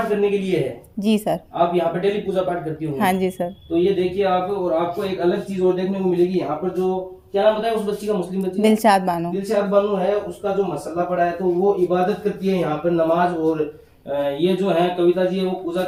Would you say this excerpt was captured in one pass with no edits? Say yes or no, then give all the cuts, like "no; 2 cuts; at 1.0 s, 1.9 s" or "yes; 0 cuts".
yes; 0 cuts